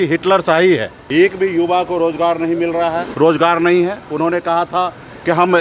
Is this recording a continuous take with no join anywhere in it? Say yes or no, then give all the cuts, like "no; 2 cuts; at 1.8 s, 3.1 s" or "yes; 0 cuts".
no; 2 cuts; at 1.0 s, 3.1 s